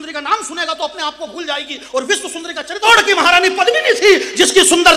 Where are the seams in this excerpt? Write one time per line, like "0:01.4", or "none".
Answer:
0:02.8